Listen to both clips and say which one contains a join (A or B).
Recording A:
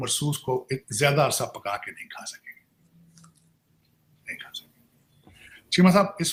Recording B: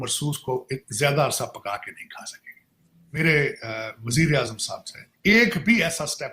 B